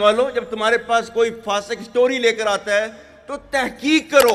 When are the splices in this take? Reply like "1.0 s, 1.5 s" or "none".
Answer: none

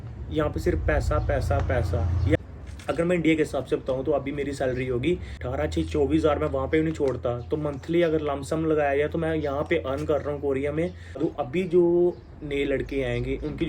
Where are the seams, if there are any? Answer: 2.4 s, 5.4 s, 11.2 s

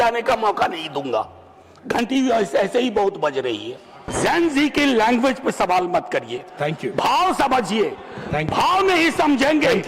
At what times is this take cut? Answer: 4.0 s

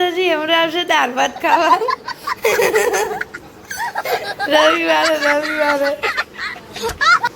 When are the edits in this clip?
6.0 s

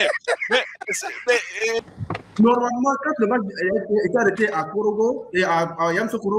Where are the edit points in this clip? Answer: 1.8 s

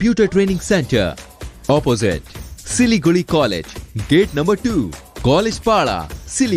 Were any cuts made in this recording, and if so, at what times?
none

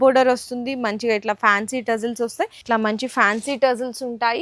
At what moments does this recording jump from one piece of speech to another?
2.6 s

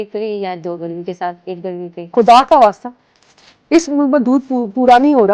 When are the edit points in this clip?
2.0 s

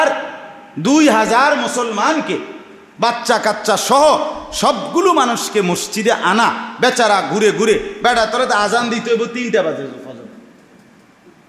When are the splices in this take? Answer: none

